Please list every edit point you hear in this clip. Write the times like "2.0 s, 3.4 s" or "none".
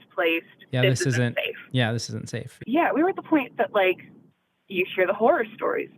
2.5 s